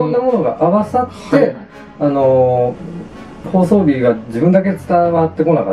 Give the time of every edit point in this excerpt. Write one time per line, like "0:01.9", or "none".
none